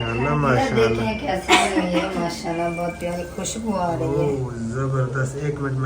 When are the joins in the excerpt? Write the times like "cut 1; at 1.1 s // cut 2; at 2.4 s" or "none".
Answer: none